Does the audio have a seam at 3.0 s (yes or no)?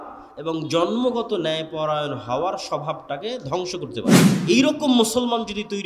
no